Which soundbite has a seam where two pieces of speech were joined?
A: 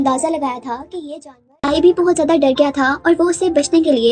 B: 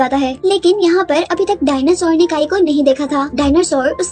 A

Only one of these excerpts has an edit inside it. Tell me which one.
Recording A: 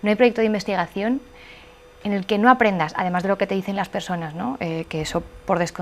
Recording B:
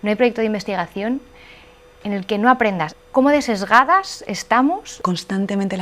B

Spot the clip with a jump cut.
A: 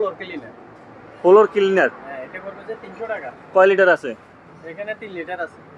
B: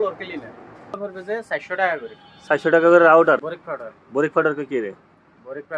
B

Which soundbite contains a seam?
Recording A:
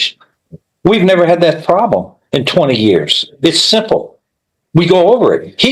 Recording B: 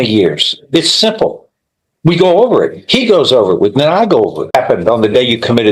B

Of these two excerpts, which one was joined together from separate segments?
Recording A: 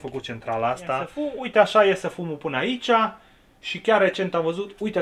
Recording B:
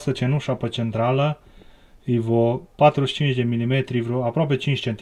A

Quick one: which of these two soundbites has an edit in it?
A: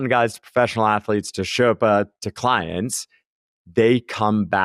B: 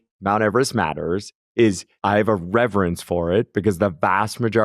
B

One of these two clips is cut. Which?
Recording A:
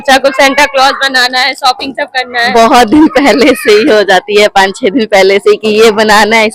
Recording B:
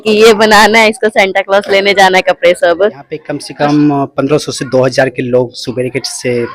B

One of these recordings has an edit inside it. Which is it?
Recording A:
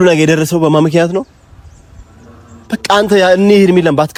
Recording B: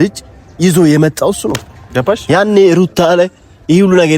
B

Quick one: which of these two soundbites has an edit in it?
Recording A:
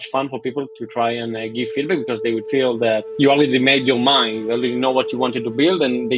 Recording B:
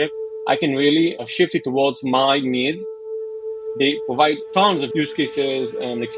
B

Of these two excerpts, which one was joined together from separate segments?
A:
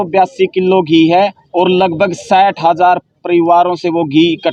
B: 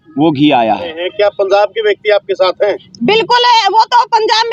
B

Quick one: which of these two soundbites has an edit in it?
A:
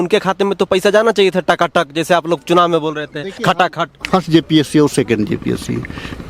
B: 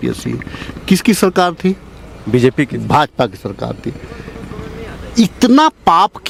A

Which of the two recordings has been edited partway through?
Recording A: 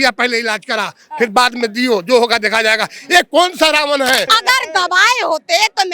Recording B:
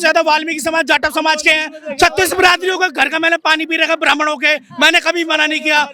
A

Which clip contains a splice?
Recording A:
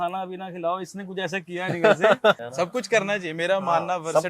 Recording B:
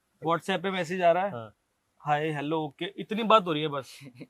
A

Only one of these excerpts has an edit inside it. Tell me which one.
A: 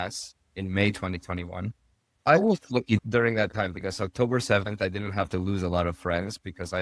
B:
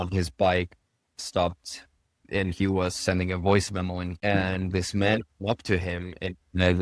B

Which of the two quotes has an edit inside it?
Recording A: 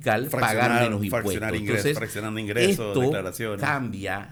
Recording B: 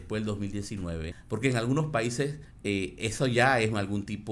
B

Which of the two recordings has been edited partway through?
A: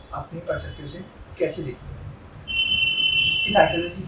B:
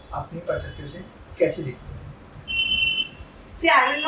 B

